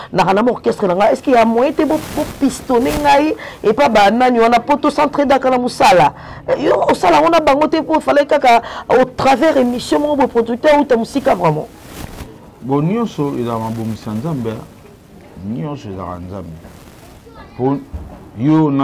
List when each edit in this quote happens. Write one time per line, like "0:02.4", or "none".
none